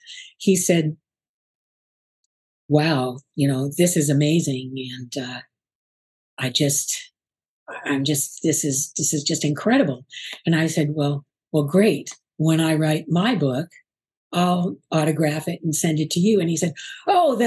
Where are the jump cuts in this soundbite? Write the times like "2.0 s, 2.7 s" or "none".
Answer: none